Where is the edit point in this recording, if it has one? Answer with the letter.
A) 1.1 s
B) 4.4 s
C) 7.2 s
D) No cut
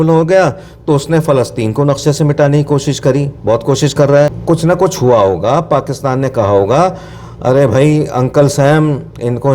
B